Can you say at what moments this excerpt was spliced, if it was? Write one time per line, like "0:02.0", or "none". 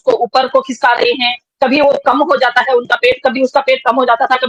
none